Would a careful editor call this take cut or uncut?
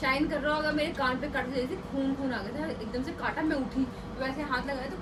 uncut